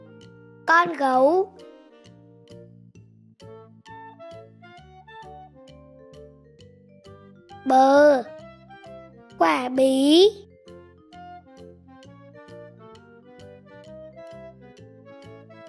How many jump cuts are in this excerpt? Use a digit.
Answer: 0